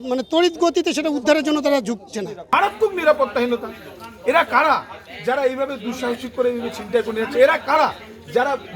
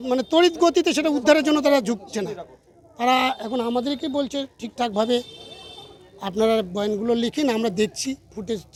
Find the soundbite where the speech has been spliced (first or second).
first